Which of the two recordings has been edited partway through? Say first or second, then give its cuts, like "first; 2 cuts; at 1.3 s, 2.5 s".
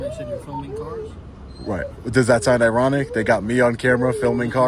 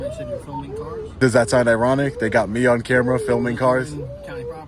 second; 1 cut; at 1.2 s